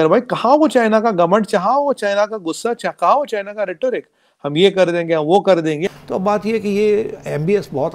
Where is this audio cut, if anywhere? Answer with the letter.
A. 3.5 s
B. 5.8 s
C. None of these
B